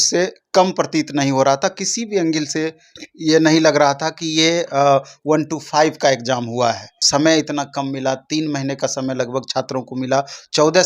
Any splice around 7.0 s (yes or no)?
yes